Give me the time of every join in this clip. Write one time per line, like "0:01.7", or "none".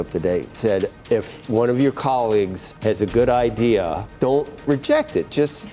0:00.9
0:02.6
0:04.0